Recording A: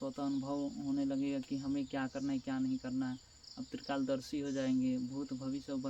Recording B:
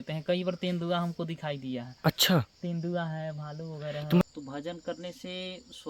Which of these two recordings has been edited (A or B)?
B